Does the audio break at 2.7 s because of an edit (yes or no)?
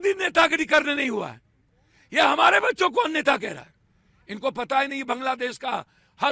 no